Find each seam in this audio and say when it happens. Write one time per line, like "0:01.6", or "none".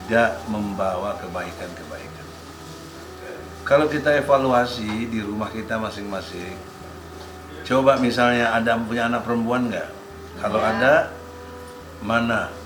none